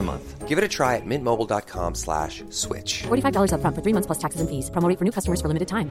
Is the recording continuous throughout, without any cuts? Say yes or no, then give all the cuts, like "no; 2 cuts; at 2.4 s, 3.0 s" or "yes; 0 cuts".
yes; 0 cuts